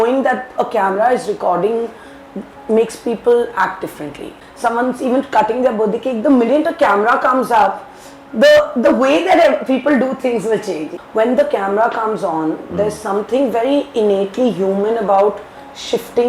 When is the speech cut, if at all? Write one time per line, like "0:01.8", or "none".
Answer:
0:04.4
0:10.9